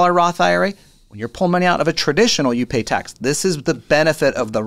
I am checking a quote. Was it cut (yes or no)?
no